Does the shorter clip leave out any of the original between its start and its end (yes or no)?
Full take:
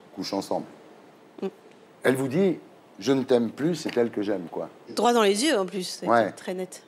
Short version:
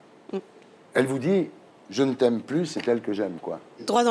no